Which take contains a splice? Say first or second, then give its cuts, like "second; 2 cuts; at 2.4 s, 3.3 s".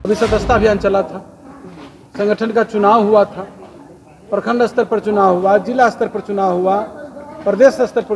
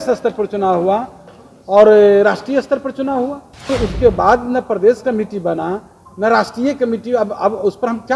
second; 1 cut; at 3.7 s